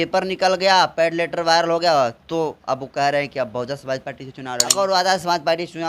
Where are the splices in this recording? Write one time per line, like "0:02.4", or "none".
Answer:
0:04.7